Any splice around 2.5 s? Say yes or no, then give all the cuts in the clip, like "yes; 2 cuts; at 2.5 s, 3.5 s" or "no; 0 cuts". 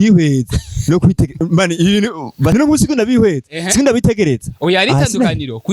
yes; 1 cut; at 2.5 s